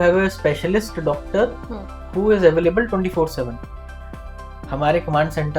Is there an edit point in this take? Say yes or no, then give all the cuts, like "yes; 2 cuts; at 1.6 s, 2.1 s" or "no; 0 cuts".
no; 0 cuts